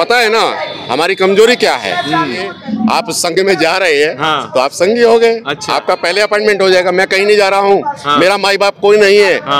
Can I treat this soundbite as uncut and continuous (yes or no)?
no